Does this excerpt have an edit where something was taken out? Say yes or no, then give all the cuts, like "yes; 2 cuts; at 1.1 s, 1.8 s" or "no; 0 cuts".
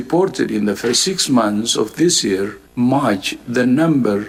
no; 0 cuts